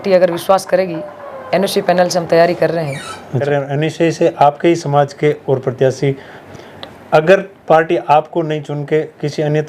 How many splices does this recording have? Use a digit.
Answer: 2